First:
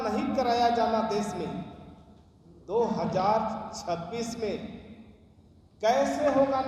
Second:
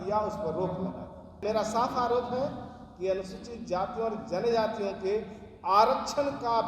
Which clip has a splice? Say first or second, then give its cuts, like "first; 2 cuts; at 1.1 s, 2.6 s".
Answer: second; 1 cut; at 1.4 s